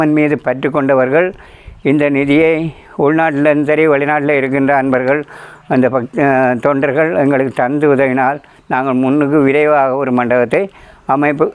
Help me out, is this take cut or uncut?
uncut